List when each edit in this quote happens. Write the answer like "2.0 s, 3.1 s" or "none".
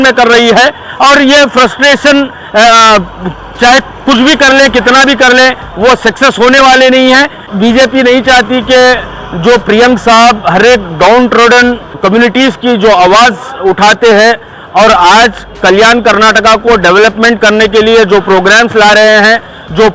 7.4 s, 12.0 s